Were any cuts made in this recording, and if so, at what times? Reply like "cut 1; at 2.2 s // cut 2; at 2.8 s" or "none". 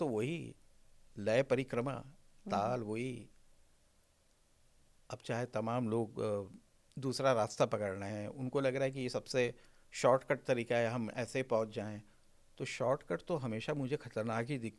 none